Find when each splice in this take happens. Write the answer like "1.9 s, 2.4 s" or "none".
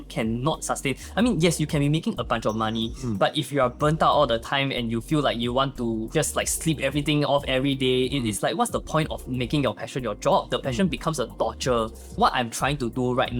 6.1 s, 12.1 s